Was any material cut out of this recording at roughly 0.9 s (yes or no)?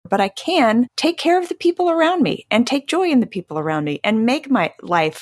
yes